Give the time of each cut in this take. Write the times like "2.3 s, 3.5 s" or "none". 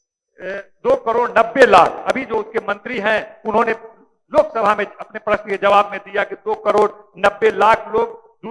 none